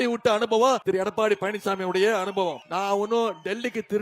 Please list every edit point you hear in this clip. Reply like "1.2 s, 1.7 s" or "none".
0.8 s, 2.6 s